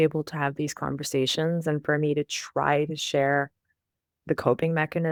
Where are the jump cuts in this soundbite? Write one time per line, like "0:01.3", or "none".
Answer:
none